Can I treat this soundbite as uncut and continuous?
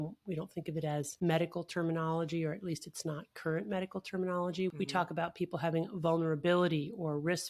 no; 2 cuts; at 1.1 s, 4.7 s

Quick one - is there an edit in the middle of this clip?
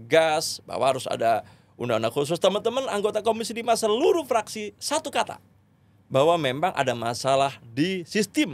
no; 0 cuts

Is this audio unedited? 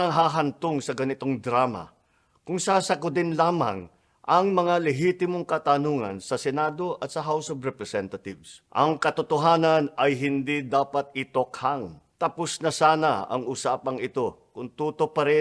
yes; 0 cuts

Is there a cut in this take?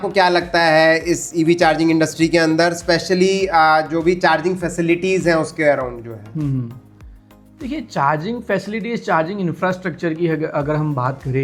no; 0 cuts

